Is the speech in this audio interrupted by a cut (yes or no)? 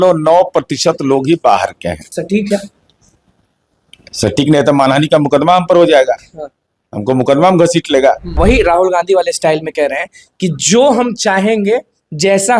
yes